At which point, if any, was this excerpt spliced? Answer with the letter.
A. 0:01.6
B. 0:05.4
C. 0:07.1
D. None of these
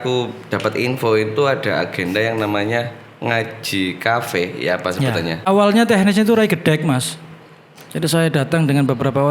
B